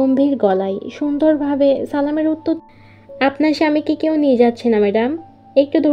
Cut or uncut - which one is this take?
cut